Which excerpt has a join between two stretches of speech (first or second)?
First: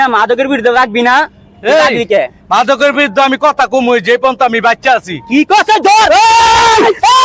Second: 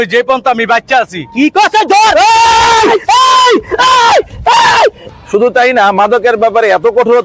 second